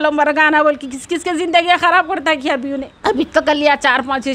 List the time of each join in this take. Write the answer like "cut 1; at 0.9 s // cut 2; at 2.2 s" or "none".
none